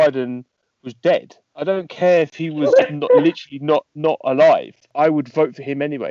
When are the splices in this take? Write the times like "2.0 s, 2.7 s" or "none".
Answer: 4.9 s